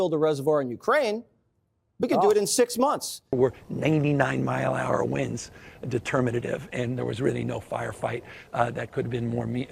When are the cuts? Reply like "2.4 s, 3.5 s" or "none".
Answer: 3.4 s